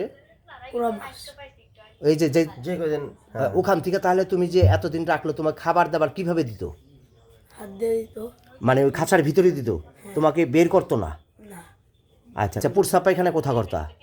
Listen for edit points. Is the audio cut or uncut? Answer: cut